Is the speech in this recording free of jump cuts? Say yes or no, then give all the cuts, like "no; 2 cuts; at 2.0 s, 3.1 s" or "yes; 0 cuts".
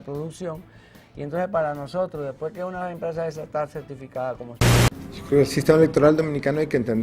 no; 1 cut; at 4.7 s